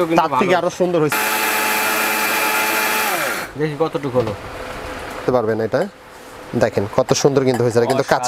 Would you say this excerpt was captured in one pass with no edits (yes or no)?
no